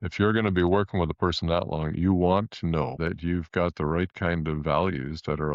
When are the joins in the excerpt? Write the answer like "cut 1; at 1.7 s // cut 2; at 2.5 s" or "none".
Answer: none